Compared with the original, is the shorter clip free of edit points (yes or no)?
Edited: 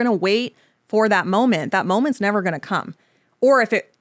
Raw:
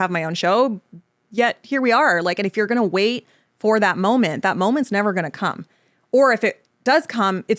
yes